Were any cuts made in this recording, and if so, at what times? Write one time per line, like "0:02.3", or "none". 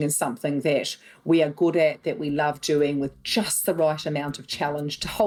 none